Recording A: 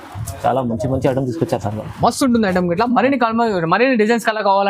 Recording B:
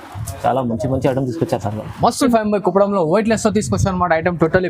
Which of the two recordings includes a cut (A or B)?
B